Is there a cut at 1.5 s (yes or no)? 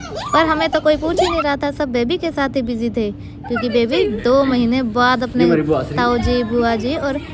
no